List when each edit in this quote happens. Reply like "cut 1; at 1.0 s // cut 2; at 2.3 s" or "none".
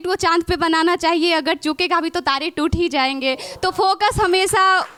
none